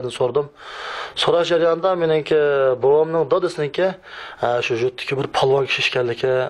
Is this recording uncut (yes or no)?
yes